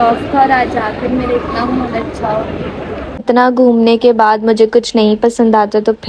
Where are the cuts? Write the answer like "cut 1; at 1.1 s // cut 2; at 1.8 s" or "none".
cut 1; at 3.2 s